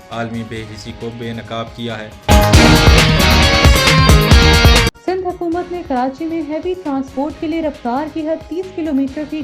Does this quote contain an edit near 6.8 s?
no; 2 cuts; at 2.1 s, 4.9 s

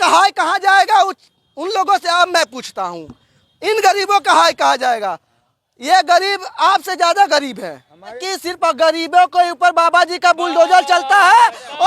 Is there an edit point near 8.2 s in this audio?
yes; 1 cut; at 8.2 s

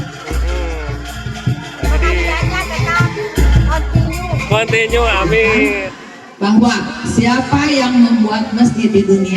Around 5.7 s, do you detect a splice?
yes; 1 cut; at 5.7 s

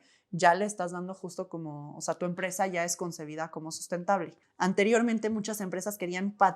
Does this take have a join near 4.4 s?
yes; 1 cut; at 4.4 s

